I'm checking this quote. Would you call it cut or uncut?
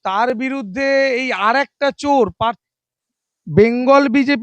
cut